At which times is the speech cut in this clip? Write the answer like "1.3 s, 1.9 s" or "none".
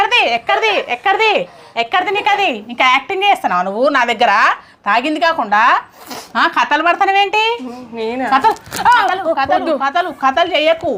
none